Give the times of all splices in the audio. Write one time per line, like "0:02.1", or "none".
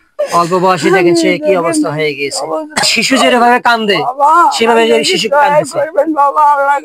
0:02.8